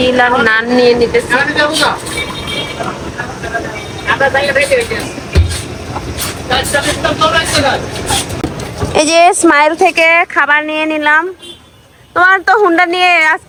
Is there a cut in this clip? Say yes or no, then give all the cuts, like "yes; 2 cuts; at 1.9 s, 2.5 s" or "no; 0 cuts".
no; 0 cuts